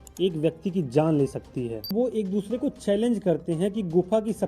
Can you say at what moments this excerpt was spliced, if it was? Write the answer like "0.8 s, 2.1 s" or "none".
1.9 s